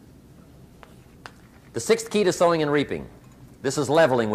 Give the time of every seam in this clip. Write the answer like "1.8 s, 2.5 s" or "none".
2.7 s